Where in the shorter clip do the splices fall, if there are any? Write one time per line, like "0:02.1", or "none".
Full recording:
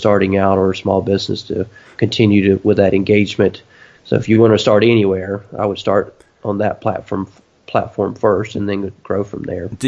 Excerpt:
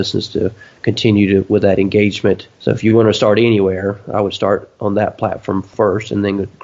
0:02.5
0:04.7
0:05.7